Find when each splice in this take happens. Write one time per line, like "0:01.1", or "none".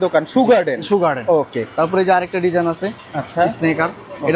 none